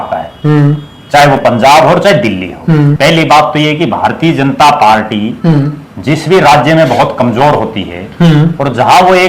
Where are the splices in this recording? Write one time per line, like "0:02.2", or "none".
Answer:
0:02.9

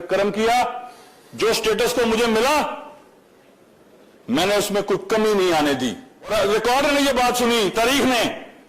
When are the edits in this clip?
0:06.3

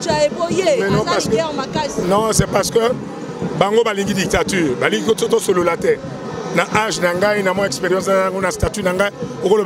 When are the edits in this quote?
none

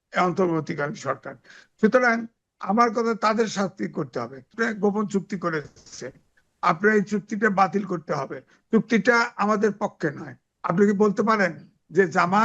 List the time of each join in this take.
0:04.5

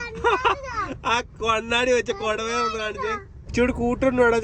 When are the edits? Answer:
0:03.5

